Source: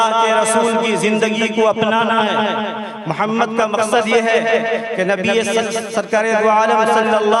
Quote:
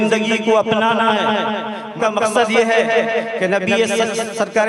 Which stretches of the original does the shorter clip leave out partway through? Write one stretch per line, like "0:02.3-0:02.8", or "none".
0:03.0-0:03.5